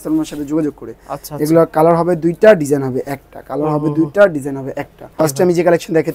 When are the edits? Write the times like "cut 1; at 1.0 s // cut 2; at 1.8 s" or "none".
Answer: cut 1; at 5.1 s